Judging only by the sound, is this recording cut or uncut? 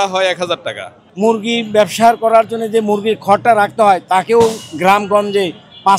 cut